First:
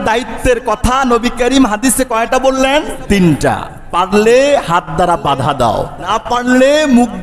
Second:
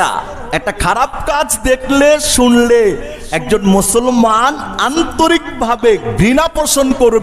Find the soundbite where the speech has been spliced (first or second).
first